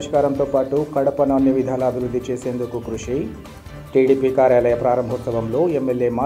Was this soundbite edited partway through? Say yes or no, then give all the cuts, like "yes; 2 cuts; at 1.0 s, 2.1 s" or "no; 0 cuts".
no; 0 cuts